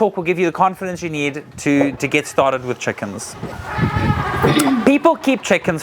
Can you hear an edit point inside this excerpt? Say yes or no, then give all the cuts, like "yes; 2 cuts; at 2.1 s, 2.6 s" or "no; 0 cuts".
yes; 1 cut; at 3.6 s